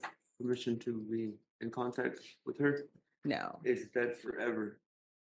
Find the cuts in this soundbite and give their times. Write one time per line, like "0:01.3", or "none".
none

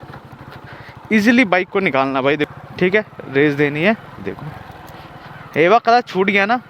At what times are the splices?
0:02.5

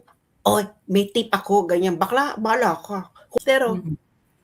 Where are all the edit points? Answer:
0:03.4

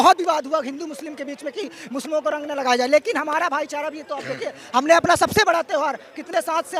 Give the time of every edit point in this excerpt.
none

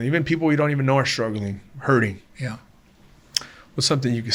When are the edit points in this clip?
none

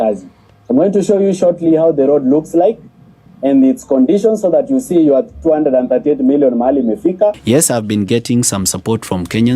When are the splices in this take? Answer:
0:07.4

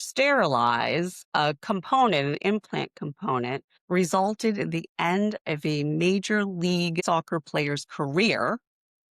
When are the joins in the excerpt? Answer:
0:07.0

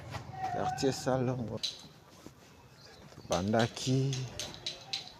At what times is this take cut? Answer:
0:01.6

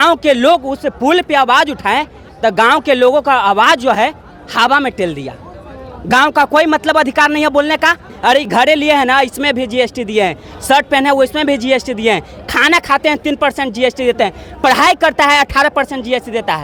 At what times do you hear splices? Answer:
none

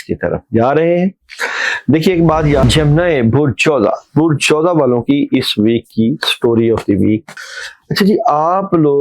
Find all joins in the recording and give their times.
0:02.6
0:07.3

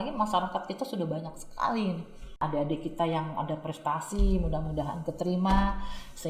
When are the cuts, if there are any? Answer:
0:02.4

